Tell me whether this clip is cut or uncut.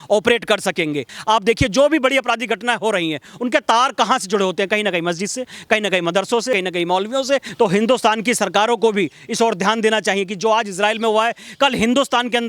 cut